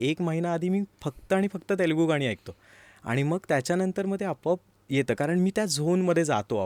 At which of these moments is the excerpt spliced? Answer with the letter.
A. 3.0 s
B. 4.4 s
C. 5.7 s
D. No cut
D